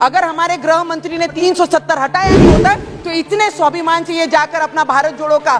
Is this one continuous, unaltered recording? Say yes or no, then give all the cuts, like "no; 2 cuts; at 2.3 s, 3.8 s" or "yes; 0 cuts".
no; 1 cut; at 1.4 s